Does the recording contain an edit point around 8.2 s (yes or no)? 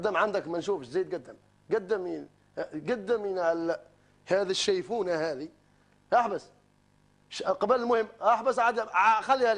no